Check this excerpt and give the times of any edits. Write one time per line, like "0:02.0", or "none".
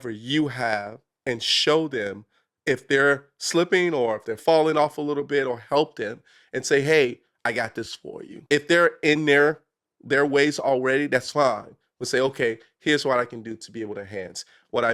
0:08.3